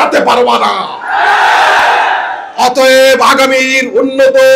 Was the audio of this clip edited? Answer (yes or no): no